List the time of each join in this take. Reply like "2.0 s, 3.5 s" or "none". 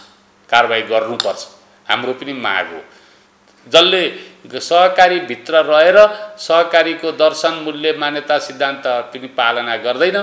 none